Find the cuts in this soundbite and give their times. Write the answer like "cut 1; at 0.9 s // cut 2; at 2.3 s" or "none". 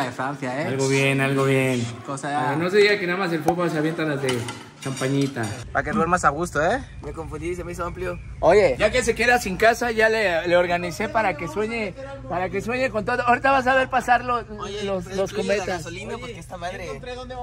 cut 1; at 5.5 s